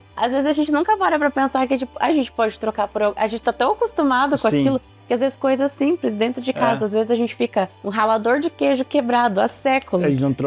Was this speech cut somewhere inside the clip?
yes; 1 cut; at 7.9 s

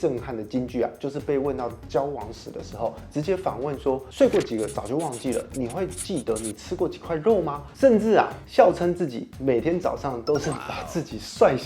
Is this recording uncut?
yes; 0 cuts

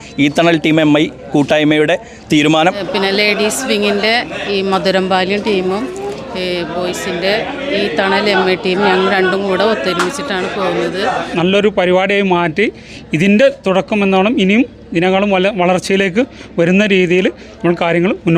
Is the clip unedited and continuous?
no; 2 cuts; at 2.8 s, 11.3 s

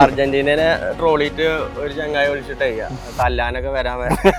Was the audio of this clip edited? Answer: no; 0 cuts

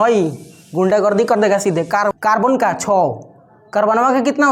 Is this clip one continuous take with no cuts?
no; 1 cut; at 2.1 s

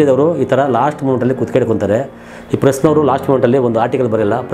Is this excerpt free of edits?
yes; 0 cuts

